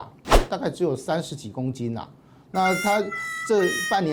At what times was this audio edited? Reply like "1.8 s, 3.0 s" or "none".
none